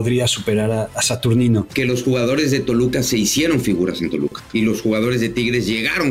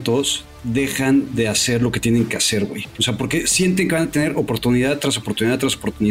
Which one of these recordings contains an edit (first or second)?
first